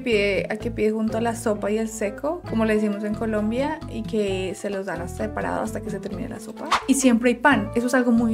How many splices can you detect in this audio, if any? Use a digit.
1